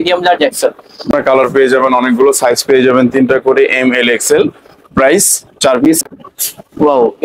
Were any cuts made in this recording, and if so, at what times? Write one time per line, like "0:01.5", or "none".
0:01.1
0:06.0

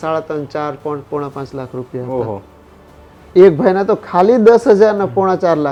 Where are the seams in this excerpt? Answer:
none

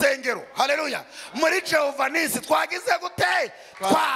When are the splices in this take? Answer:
none

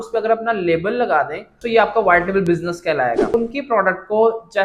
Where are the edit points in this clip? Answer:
0:03.3

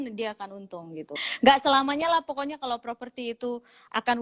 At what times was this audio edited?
0:01.3

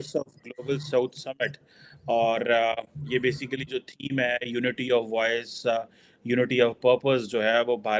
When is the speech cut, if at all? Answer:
none

